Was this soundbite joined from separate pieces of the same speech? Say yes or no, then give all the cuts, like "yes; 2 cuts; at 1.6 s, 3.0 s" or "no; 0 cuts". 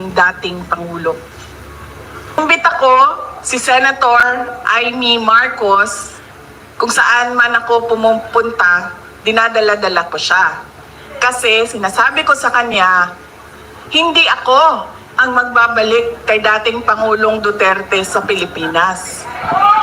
yes; 1 cut; at 2.4 s